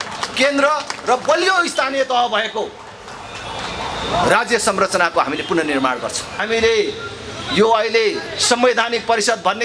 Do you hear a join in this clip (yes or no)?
yes